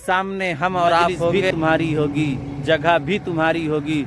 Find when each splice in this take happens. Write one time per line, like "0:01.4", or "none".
0:01.4

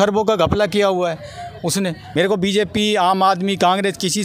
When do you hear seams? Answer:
0:02.0

